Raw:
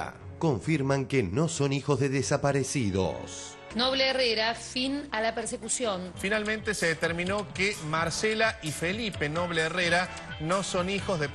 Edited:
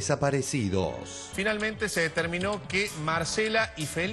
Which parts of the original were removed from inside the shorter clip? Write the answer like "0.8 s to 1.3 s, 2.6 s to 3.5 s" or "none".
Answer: 3.5 s to 6.1 s